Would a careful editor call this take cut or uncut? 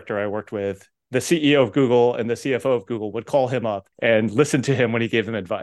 cut